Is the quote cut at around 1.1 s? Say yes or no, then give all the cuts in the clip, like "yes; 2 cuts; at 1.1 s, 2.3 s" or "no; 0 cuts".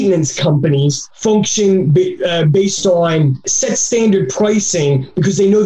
yes; 1 cut; at 1.1 s